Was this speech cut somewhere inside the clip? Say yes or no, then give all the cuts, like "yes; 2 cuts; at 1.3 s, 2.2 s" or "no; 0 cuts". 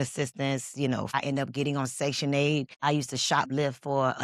yes; 2 cuts; at 1.1 s, 2.7 s